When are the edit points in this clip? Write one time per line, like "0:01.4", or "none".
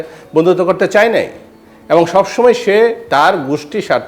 none